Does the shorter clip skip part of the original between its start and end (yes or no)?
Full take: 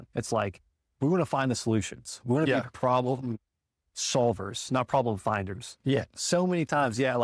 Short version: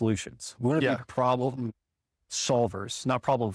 no